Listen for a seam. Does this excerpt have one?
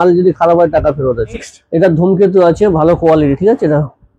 yes; 1 cut; at 1.5 s

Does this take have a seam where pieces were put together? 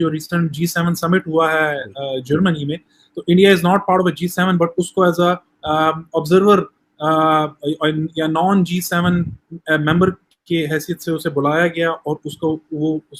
no; 0 cuts

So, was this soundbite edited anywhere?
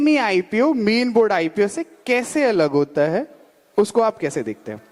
no; 0 cuts

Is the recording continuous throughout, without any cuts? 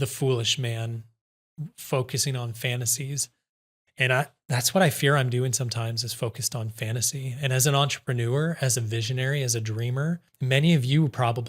no; 1 cut; at 10.3 s

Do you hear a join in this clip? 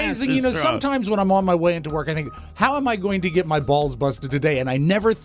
no; 0 cuts

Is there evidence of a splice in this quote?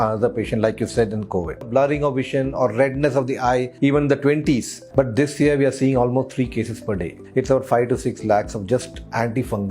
yes; 4 cuts; at 1.7 s, 3.7 s, 4.8 s, 7.2 s

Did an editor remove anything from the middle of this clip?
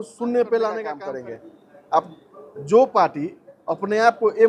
yes; 1 cut; at 1.0 s

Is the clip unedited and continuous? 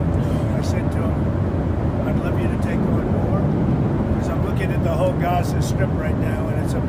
yes; 0 cuts

